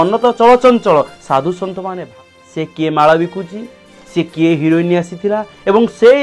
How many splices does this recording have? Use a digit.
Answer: 1